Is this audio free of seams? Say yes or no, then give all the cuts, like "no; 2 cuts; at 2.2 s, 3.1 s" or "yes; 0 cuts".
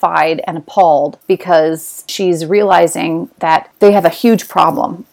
no; 1 cut; at 2.1 s